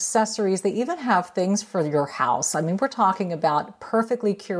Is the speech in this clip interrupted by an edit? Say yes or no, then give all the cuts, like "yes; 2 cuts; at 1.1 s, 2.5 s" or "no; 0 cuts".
no; 0 cuts